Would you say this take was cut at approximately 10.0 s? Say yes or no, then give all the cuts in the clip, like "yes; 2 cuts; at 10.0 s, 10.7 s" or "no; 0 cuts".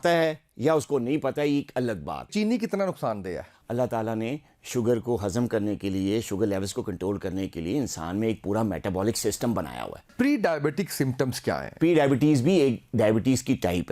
yes; 4 cuts; at 2.3 s, 3.5 s, 10.0 s, 11.7 s